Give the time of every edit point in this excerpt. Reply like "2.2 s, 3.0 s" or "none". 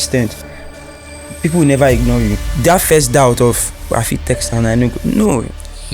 2.5 s